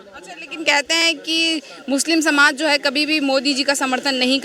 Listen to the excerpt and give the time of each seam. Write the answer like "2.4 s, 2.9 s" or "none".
none